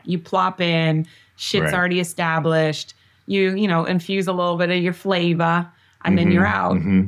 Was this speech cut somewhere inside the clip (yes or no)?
no